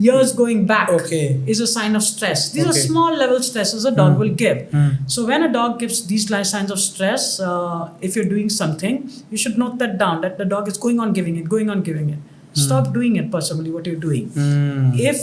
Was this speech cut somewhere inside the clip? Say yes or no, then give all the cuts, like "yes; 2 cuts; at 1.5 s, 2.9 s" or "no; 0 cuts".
no; 0 cuts